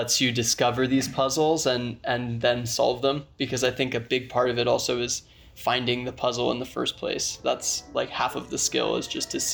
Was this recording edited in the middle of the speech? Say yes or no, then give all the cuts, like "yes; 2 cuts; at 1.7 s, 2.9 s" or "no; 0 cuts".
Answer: no; 0 cuts